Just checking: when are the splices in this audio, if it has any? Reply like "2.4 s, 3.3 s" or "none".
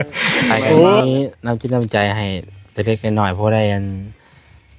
1.0 s